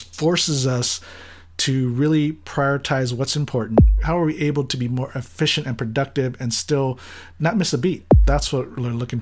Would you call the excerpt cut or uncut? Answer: cut